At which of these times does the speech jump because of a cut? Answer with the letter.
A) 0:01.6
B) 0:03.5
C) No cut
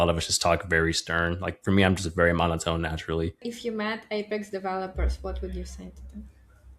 B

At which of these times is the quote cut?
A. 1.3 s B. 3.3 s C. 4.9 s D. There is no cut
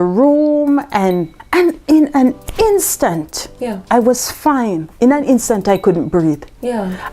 A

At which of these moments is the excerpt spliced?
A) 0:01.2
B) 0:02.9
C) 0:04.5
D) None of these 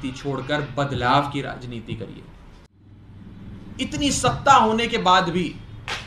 B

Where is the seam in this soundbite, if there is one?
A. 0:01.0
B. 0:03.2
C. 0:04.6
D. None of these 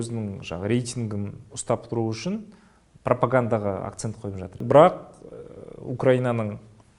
C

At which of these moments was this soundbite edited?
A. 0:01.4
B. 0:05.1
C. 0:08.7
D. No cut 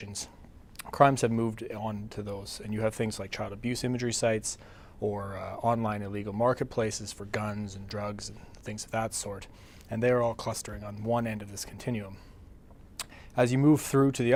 D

